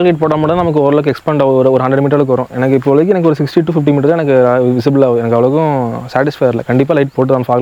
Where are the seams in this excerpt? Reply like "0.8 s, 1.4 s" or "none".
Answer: none